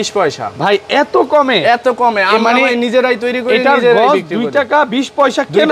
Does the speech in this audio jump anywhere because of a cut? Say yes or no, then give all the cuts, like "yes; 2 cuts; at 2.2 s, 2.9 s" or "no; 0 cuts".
no; 0 cuts